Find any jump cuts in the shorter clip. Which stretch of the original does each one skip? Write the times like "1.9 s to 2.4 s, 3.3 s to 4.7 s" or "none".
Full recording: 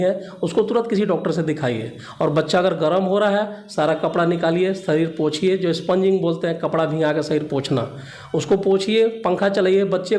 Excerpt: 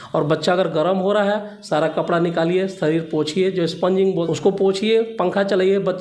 6.3 s to 8.3 s